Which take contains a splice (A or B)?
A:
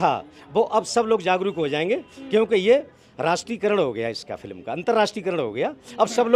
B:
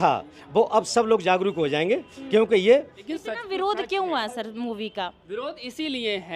B